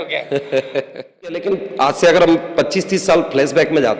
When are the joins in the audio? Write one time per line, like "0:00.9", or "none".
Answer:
0:01.4